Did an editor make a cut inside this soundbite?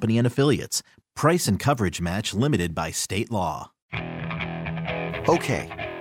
yes; 1 cut; at 3.8 s

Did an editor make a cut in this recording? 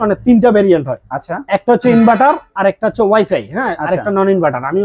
no; 0 cuts

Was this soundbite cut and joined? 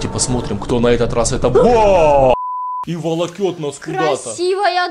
yes; 1 cut; at 2.3 s

